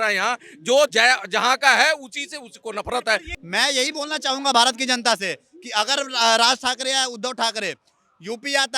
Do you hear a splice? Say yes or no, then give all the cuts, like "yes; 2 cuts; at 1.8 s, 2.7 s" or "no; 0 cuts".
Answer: yes; 1 cut; at 3.3 s